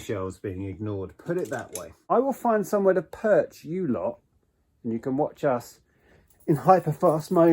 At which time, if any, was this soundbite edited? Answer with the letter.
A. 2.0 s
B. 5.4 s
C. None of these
A